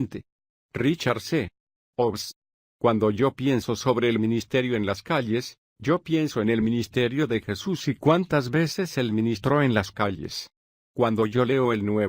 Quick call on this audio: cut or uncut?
cut